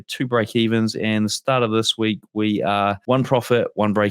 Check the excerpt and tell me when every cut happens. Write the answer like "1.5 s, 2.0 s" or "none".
3.0 s